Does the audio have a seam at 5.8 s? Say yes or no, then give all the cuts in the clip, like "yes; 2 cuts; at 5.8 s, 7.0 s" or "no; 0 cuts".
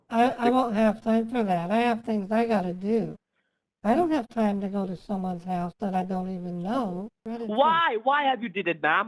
no; 1 cut; at 7.2 s